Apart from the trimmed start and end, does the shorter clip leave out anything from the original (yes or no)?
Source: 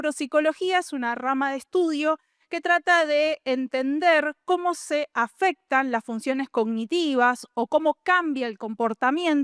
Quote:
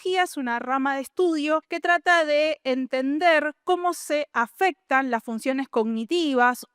yes